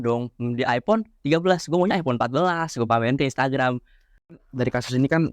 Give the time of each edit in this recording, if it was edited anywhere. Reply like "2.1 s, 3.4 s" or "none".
4.3 s